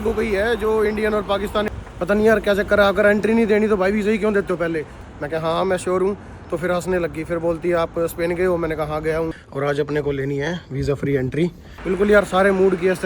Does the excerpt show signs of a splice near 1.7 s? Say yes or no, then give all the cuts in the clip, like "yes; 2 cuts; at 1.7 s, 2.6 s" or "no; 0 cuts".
yes; 4 cuts; at 1.7 s, 5.0 s, 9.4 s, 11.7 s